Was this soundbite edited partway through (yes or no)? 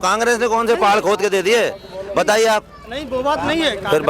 no